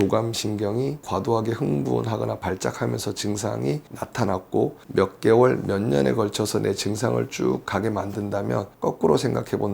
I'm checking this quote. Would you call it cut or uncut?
cut